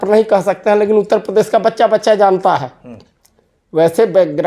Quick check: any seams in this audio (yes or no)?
no